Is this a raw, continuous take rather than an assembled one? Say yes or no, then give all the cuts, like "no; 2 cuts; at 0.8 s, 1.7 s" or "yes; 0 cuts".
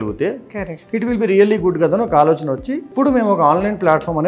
no; 1 cut; at 2.9 s